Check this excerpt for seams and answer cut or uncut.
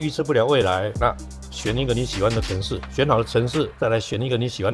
uncut